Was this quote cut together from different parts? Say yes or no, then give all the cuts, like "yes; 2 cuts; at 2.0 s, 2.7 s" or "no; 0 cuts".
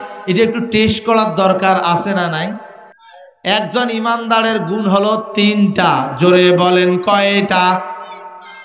no; 0 cuts